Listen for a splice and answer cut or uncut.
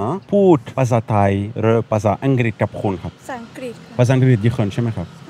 uncut